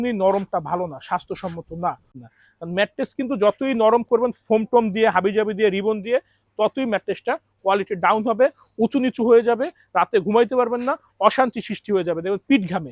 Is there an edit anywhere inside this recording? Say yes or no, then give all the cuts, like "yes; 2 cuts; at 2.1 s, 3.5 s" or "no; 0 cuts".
yes; 1 cut; at 2.2 s